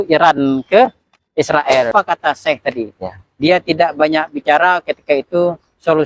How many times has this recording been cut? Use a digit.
1